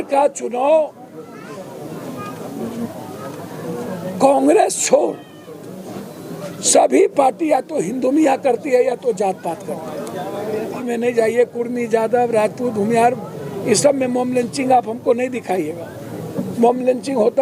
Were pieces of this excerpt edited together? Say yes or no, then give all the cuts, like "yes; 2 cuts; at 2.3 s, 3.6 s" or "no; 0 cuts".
yes; 1 cut; at 10.8 s